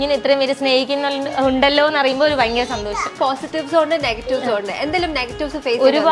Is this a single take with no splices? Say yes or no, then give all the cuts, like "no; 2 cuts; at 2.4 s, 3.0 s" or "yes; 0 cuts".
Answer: no; 1 cut; at 3.2 s